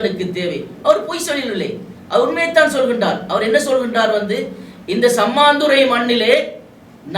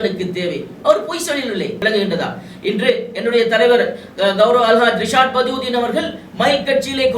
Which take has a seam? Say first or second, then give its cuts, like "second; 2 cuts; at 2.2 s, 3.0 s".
second; 1 cut; at 1.8 s